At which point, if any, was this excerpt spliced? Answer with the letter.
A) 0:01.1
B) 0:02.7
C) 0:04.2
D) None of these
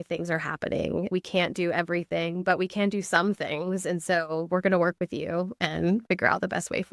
A